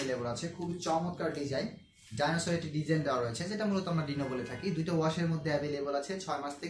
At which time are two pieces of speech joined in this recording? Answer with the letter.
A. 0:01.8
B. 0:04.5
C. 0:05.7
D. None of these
D